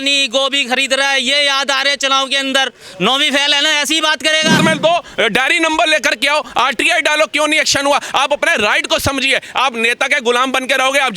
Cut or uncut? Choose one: cut